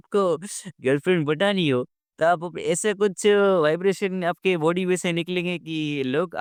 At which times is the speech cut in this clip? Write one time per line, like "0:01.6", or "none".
none